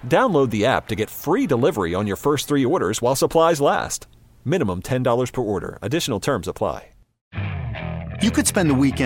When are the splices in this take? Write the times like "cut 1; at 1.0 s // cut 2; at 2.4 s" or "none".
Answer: cut 1; at 7.1 s

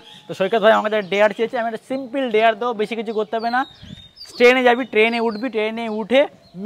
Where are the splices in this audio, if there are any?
none

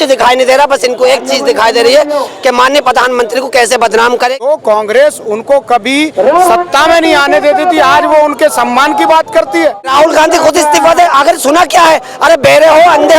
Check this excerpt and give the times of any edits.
cut 1; at 4.5 s // cut 2; at 9.9 s

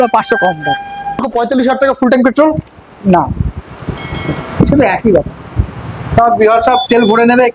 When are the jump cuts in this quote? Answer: cut 1; at 1.2 s

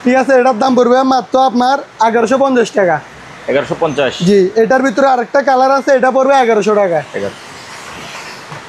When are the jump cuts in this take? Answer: none

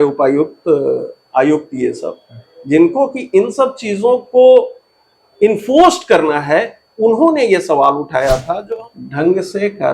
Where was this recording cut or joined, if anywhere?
cut 1; at 8.7 s

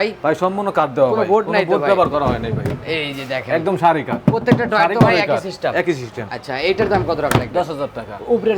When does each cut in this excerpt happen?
none

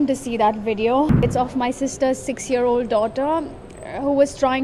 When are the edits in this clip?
cut 1; at 1.2 s

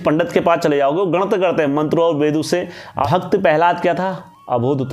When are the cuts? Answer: cut 1; at 3.0 s

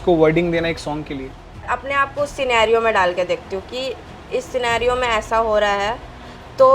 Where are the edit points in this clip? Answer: cut 1; at 1.7 s

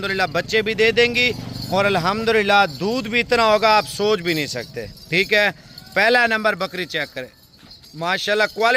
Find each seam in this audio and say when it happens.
none

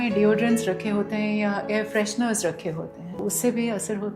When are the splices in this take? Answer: cut 1; at 3.0 s

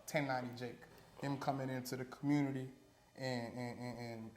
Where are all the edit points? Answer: cut 1; at 1.0 s

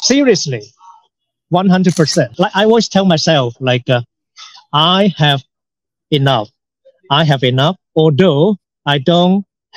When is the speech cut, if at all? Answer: cut 1; at 2.3 s

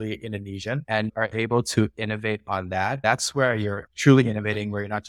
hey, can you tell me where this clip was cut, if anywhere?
cut 1; at 3.0 s // cut 2; at 3.9 s

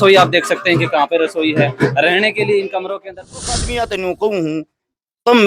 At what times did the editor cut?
cut 1; at 3.4 s

